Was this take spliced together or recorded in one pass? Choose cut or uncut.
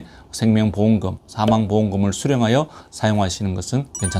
uncut